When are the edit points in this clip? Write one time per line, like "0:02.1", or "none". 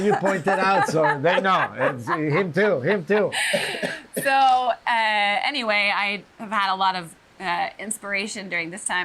none